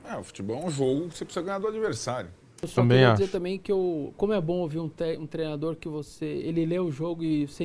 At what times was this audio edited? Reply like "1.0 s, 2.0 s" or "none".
2.7 s